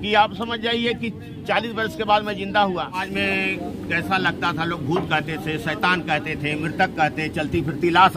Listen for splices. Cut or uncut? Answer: cut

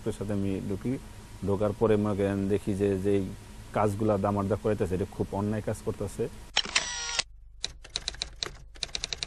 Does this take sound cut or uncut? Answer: uncut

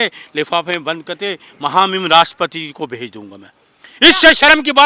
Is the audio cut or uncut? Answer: uncut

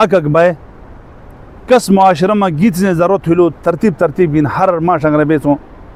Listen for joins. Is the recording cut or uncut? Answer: uncut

